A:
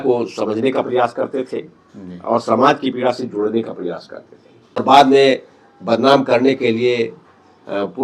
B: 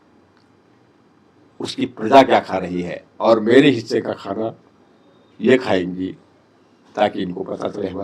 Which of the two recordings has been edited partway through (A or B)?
A